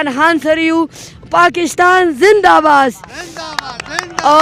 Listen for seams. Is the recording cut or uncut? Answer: uncut